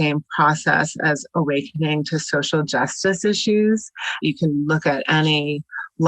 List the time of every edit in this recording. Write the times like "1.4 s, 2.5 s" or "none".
4.2 s